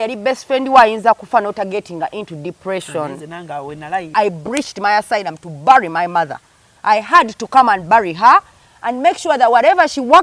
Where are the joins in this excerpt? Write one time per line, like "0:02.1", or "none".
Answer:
0:04.1